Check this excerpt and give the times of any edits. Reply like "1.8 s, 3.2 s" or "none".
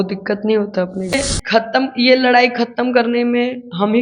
1.1 s